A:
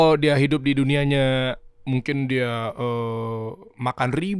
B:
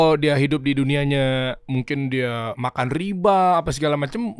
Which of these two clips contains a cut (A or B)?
B